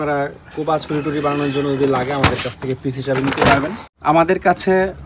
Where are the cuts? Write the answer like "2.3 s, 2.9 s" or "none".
3.8 s

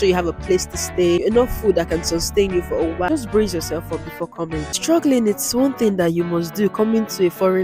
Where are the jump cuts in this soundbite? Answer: 1.2 s, 3.1 s, 4.7 s

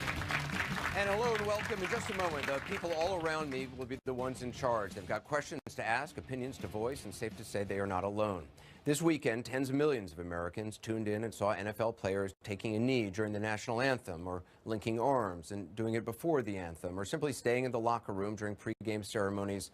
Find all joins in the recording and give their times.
12.0 s

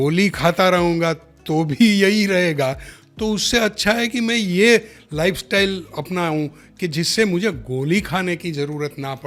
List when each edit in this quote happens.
none

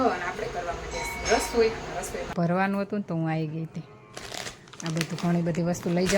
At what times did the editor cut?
2.3 s

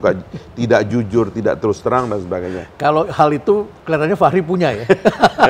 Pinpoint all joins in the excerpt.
3.7 s

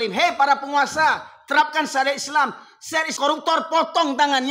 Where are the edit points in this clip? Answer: 3.1 s

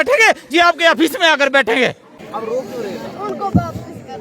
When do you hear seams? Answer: 2.1 s

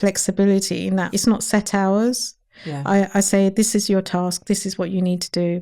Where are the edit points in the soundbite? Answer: 1.1 s

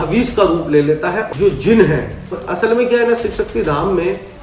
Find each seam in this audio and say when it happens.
1.2 s, 2.4 s

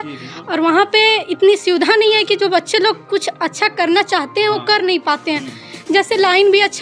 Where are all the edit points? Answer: none

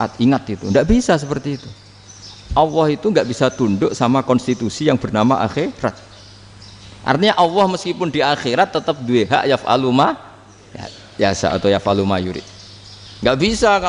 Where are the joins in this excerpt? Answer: none

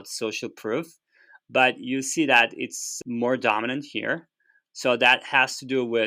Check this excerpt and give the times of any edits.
none

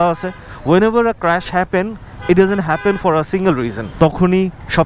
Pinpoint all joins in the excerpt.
3.8 s

